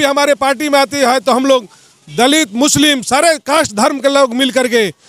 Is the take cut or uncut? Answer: uncut